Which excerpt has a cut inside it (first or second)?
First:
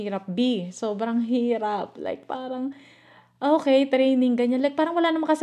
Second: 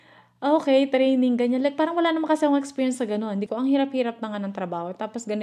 second